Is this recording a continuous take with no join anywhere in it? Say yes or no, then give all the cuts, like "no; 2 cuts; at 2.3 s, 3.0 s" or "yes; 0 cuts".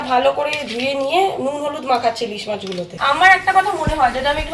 no; 1 cut; at 2.9 s